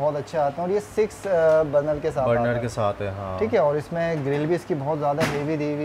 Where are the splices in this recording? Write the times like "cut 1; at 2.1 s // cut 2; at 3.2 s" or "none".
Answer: none